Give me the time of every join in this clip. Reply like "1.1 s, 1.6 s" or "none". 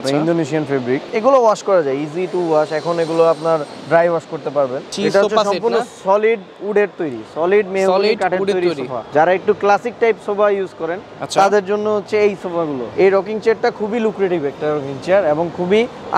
1.1 s, 4.9 s, 9.1 s, 12.8 s